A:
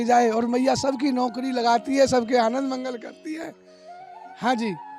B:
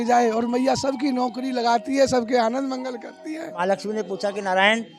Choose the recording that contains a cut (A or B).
B